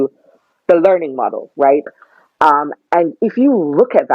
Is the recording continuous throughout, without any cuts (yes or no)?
no